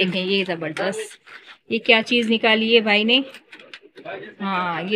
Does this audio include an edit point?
no; 0 cuts

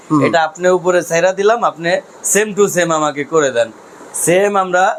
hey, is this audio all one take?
yes; 0 cuts

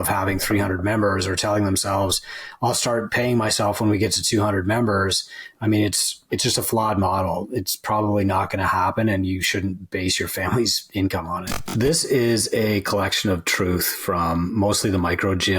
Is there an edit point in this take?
yes; 1 cut; at 11.6 s

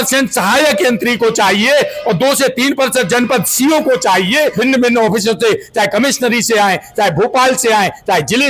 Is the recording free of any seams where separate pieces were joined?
no; 1 cut; at 4.5 s

